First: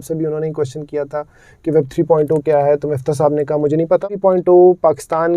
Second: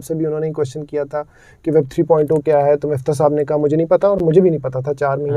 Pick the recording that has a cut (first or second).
first